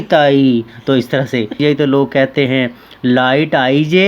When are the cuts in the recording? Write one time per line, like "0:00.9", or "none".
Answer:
0:01.6